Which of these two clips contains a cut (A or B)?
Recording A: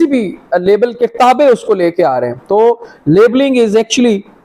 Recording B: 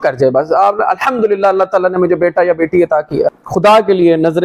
B